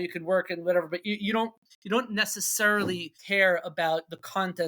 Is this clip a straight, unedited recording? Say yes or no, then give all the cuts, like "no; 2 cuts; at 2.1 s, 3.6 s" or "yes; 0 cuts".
no; 2 cuts; at 1.7 s, 3.1 s